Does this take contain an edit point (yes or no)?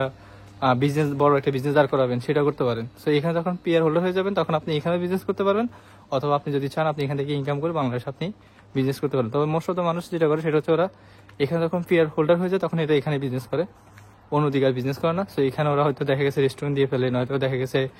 no